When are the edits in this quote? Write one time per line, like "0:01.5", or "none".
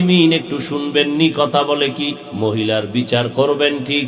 0:02.2